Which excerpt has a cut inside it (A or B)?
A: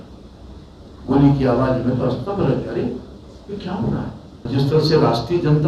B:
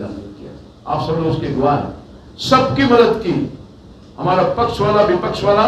A